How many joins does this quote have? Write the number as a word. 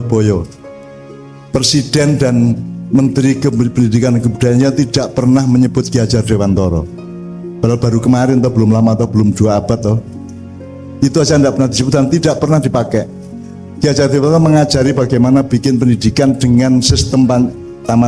zero